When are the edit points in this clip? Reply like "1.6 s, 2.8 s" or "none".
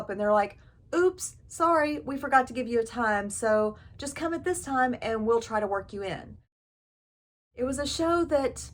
7.1 s